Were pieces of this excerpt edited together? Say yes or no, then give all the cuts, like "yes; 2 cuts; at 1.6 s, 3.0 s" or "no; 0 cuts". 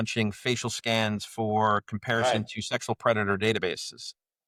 no; 0 cuts